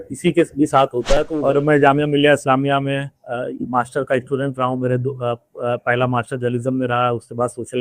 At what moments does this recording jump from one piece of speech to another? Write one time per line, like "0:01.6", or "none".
0:01.1